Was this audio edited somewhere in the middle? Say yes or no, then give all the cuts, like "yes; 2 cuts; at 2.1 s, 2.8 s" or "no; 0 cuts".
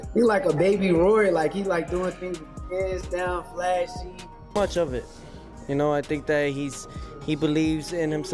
yes; 1 cut; at 4.5 s